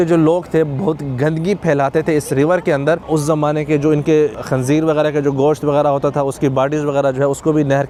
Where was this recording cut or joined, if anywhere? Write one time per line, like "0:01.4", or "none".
none